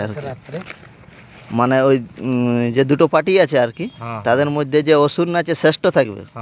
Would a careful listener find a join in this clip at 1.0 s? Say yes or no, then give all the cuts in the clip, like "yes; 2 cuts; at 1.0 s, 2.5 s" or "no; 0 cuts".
no; 0 cuts